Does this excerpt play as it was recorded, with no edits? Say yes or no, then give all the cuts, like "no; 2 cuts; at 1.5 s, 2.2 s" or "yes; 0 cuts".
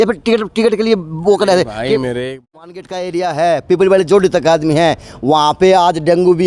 no; 1 cut; at 2.4 s